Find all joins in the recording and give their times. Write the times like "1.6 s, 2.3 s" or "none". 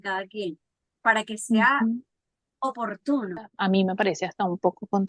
3.5 s